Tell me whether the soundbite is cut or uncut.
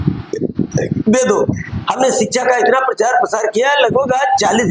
uncut